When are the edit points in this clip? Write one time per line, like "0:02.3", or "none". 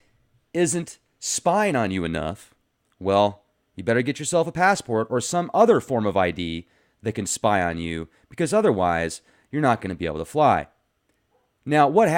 none